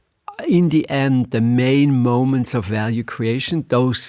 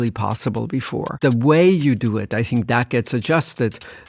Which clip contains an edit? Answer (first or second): second